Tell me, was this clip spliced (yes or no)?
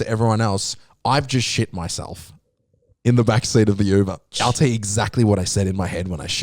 yes